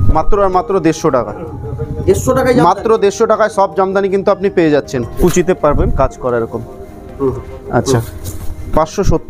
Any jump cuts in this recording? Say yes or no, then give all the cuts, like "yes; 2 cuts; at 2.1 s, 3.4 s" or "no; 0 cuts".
yes; 1 cut; at 5.1 s